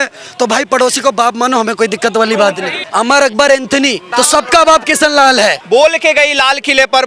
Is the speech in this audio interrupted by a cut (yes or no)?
yes